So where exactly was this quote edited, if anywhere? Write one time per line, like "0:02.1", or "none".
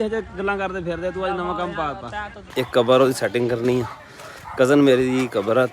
0:02.4